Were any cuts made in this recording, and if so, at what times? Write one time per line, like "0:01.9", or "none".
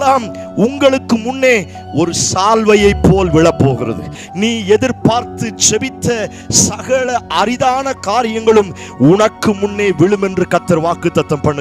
0:04.2